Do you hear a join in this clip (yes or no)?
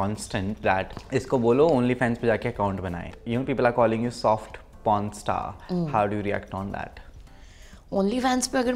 yes